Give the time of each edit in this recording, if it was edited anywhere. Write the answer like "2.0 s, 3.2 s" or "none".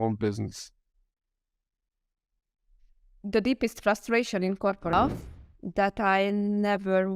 4.9 s